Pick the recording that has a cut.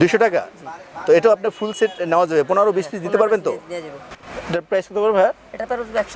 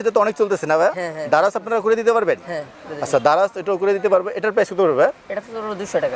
first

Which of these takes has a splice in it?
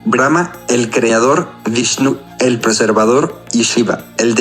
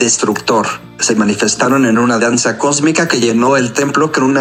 first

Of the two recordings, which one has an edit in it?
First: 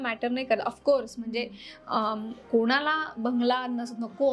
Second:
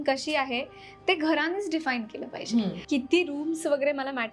second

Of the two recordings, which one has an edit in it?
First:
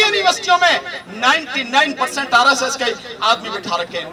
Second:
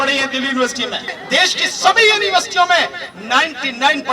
second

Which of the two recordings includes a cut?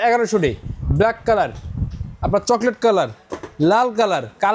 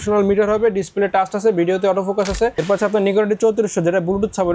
second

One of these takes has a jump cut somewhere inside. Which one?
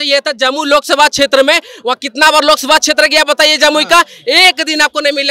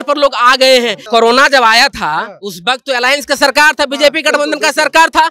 second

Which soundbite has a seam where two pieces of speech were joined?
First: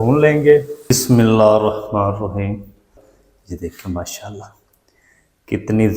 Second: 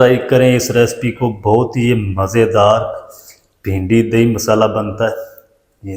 first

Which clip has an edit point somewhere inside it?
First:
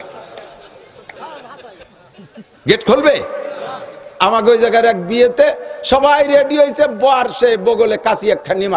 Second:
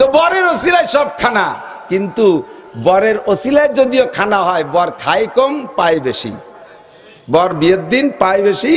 first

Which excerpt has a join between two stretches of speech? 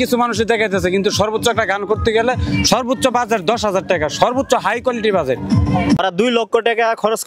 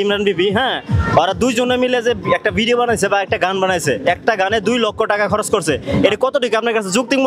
first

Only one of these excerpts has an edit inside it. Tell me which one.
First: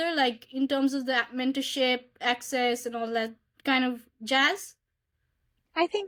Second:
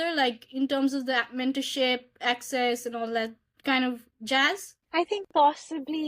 second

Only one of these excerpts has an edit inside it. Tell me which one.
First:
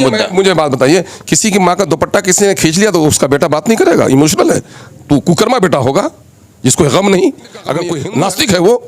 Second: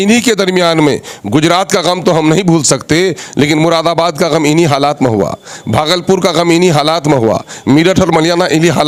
first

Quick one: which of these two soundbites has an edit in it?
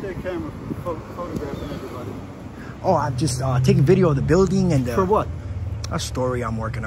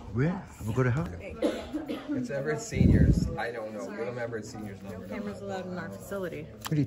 second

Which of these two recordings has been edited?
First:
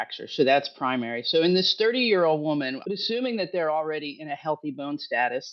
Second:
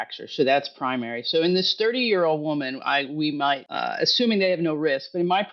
first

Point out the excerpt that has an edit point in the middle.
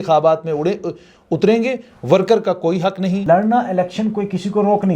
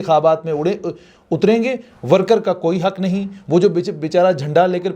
first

